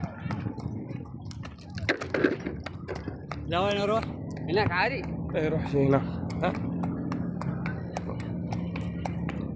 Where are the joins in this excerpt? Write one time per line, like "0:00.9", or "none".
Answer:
0:07.4

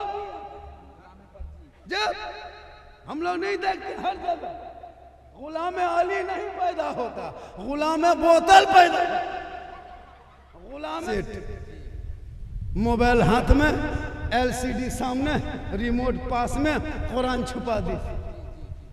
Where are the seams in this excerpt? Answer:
0:11.0

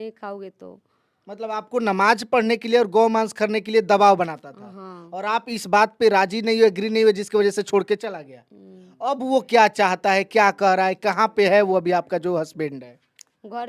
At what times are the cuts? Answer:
none

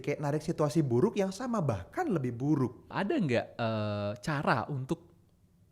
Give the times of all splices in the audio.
0:02.8

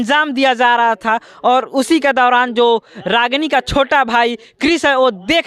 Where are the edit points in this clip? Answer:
none

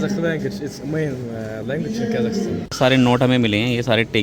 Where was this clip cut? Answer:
0:02.6

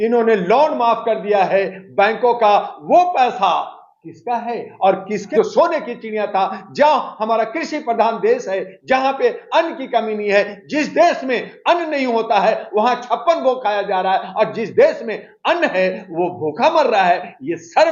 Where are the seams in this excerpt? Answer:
0:05.2

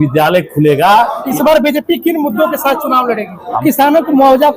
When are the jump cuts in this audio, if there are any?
0:01.2
0:03.6

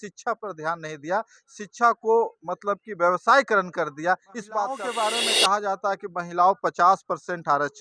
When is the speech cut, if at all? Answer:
0:04.8

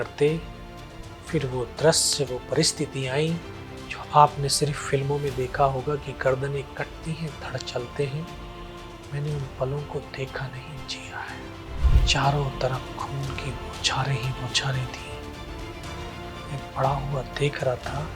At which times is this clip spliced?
0:11.8

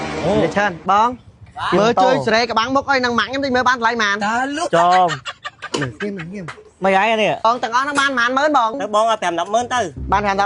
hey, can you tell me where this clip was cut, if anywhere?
0:07.4

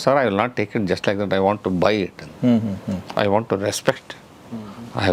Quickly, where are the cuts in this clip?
none

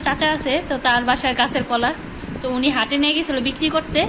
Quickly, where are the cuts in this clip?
none

